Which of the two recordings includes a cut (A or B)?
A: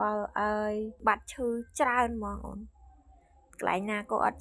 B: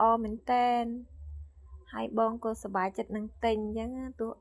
A